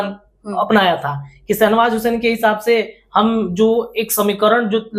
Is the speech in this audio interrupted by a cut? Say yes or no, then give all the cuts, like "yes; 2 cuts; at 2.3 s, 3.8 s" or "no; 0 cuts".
no; 0 cuts